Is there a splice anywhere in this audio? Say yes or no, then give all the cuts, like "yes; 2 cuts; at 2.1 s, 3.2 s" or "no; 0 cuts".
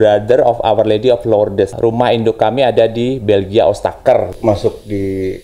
yes; 2 cuts; at 1.7 s, 4.3 s